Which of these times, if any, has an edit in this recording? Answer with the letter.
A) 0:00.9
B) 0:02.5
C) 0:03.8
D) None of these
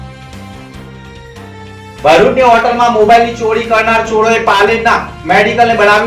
A